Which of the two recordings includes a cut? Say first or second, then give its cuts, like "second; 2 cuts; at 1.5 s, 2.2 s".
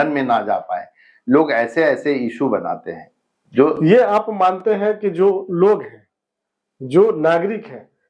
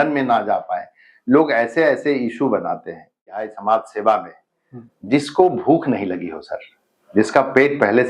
second; 1 cut; at 3.4 s